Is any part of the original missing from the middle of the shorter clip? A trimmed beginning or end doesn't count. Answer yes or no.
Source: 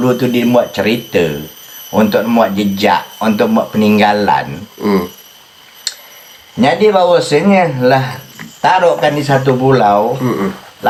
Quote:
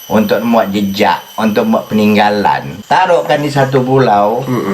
yes